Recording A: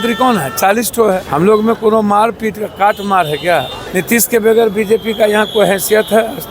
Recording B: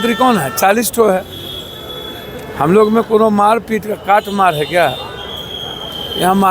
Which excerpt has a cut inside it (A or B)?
A